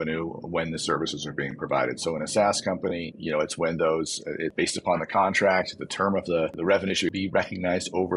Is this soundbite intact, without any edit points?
no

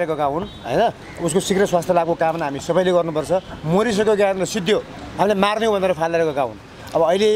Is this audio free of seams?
yes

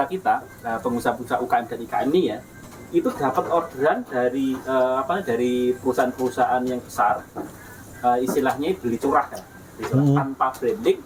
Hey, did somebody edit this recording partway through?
no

